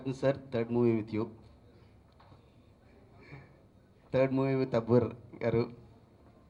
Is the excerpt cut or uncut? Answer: uncut